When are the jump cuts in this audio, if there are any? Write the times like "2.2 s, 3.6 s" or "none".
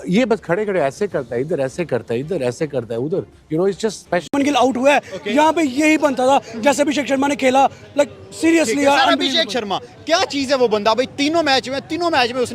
4.3 s